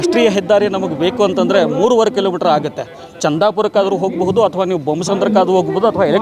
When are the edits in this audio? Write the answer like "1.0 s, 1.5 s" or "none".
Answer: none